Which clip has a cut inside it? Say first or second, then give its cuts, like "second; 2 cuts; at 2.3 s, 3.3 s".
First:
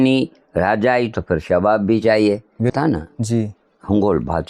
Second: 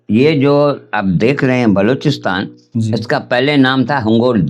first; 1 cut; at 2.6 s